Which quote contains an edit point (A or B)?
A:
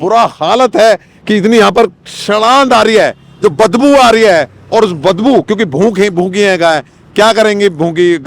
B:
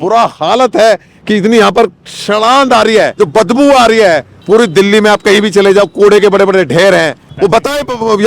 B